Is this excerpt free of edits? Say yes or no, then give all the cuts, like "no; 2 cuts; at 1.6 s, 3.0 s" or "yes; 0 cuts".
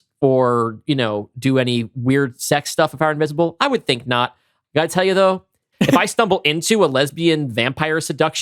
yes; 0 cuts